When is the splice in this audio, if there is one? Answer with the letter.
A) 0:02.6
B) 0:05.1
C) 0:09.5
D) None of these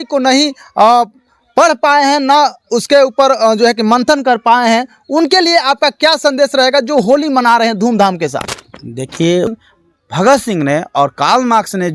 C